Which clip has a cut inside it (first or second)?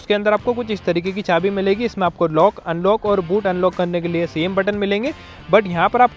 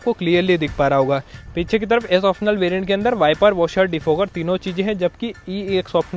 second